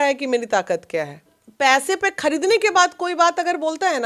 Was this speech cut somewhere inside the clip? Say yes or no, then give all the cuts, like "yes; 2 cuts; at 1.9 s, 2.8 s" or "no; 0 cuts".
yes; 1 cut; at 1.4 s